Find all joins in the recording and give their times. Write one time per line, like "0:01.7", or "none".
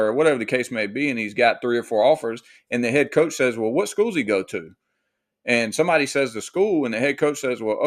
none